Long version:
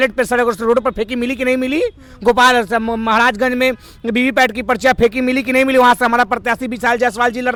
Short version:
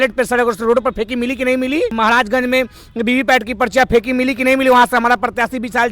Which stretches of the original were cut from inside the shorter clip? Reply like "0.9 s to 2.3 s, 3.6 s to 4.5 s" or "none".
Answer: 1.9 s to 3.0 s